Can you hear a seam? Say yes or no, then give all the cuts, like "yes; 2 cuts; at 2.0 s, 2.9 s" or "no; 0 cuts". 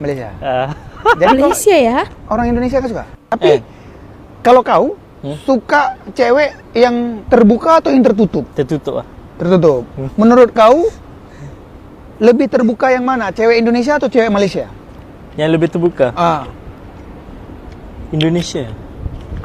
no; 0 cuts